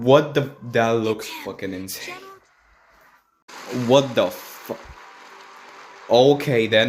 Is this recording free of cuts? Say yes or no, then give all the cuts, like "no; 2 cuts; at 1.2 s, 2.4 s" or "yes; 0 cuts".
no; 1 cut; at 3.7 s